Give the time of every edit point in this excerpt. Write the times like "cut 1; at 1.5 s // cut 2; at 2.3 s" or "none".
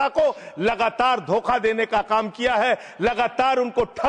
none